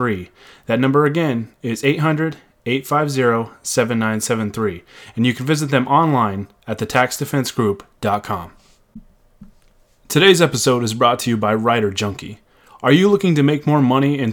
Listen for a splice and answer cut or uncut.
cut